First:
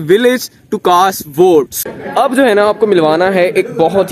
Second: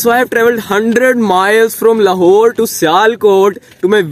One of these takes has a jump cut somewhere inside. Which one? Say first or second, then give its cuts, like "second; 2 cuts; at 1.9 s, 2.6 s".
first; 1 cut; at 1.7 s